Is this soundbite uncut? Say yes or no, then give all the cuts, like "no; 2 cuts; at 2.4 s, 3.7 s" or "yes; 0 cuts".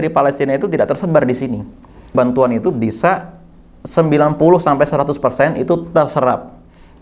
no; 1 cut; at 2.1 s